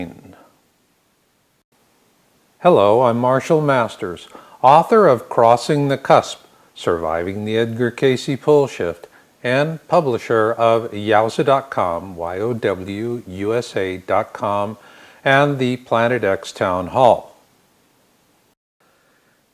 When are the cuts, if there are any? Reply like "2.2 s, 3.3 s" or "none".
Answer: 3.0 s

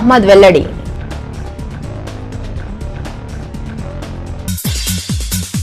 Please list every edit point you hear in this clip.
0.8 s, 4.6 s

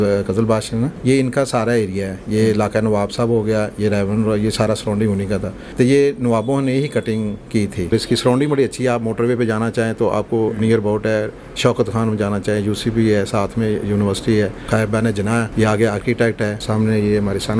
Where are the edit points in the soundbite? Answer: 1.0 s, 5.6 s, 7.9 s, 15.1 s, 16.6 s

